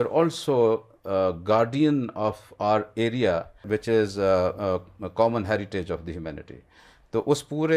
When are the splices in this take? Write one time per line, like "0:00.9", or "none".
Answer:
none

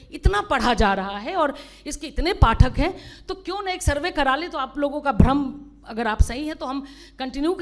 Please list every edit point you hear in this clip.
none

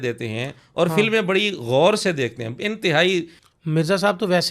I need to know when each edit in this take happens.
0:03.4

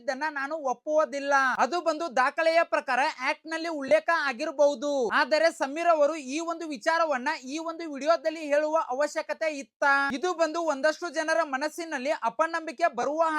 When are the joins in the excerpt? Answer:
none

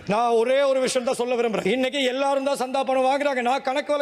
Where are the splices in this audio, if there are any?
none

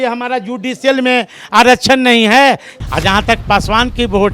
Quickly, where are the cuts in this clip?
0:02.7

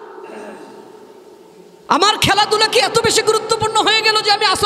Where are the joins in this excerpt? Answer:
none

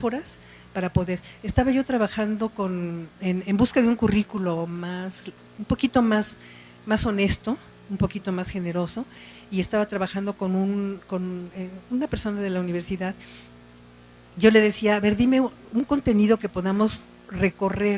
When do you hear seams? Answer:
0:01.4

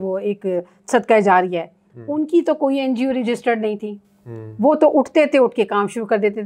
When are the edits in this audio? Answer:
none

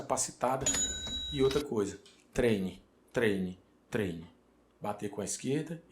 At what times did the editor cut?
0:00.9

